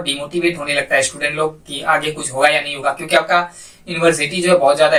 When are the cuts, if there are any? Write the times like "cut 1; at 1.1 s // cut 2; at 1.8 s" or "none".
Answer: none